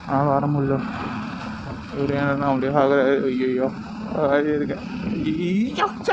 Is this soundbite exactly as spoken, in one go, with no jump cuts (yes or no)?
yes